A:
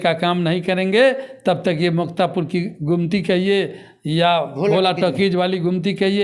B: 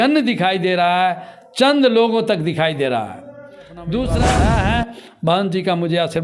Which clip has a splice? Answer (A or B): B